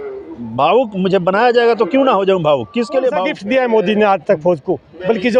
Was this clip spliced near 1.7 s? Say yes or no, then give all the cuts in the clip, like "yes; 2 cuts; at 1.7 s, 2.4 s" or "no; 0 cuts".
no; 1 cut; at 3.3 s